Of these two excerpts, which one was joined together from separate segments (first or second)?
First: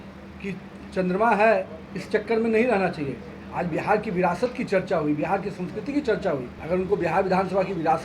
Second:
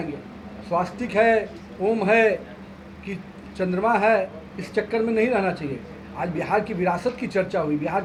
first